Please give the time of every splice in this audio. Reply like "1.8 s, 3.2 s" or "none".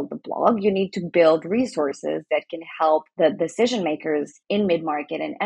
none